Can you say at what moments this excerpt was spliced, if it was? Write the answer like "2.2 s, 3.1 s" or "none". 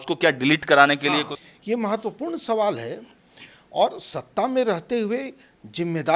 1.4 s